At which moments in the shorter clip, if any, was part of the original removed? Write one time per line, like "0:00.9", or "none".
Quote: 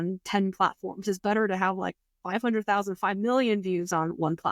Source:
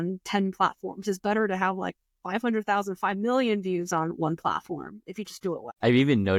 none